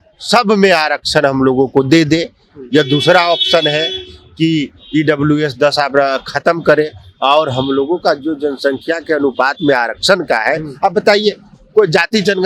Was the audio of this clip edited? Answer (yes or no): no